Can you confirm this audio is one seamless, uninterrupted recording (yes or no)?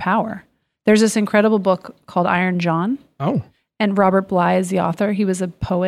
yes